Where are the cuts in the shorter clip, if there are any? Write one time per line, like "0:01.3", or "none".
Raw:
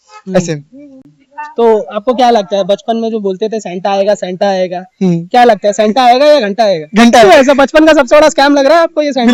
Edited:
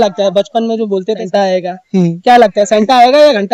0:01.2